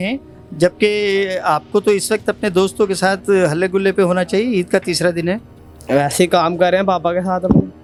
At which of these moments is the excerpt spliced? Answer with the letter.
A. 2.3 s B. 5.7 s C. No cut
C